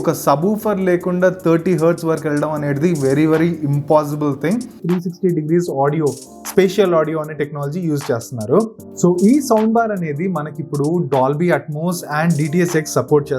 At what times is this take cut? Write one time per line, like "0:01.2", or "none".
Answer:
0:04.7
0:08.8